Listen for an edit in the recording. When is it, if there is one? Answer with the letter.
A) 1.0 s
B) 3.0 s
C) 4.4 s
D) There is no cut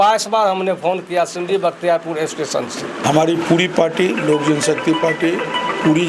B